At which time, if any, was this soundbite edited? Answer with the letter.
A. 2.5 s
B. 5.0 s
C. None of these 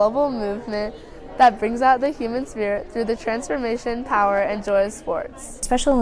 B